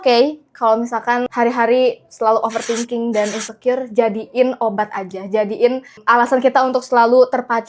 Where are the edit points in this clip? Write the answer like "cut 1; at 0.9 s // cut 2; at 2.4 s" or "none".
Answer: cut 1; at 1.3 s // cut 2; at 5.9 s